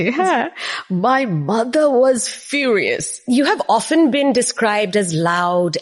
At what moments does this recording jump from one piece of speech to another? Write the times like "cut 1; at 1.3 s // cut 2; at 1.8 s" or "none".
cut 1; at 3.1 s